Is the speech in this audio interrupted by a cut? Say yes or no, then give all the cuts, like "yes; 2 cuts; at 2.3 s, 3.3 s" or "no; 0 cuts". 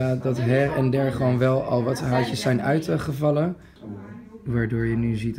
yes; 1 cut; at 3.7 s